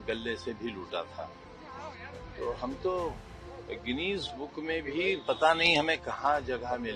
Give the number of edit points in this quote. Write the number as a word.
zero